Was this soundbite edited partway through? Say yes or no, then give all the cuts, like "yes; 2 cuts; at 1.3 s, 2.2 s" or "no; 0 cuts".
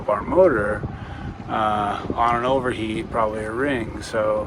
no; 0 cuts